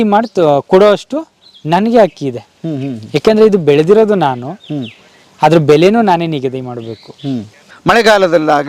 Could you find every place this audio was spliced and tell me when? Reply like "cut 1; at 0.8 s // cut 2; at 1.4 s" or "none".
cut 1; at 7.7 s

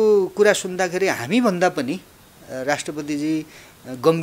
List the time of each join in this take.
none

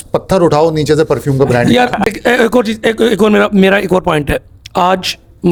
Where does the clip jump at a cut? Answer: none

